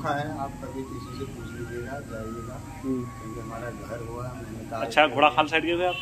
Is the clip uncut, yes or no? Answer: yes